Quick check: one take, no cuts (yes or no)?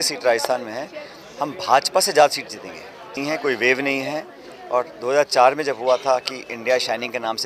no